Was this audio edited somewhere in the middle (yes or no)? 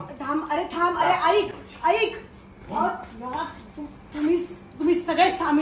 no